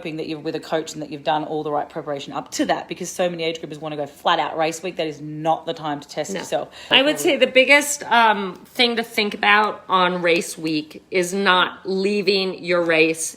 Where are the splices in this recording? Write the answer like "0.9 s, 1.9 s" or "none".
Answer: 6.8 s